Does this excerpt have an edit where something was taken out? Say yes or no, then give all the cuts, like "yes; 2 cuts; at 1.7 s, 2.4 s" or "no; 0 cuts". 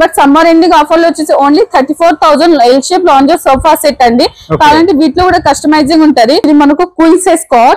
yes; 1 cut; at 6.4 s